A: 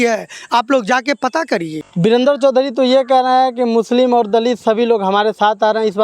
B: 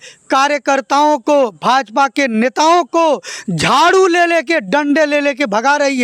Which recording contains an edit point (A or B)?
A